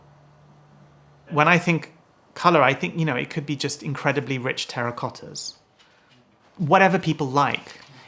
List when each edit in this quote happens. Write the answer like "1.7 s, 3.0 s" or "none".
1.3 s